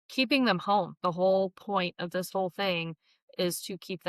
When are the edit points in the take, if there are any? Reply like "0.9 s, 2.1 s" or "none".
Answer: 0.9 s